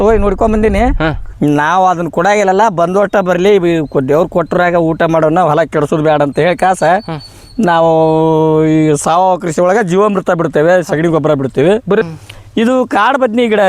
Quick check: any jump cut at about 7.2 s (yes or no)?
no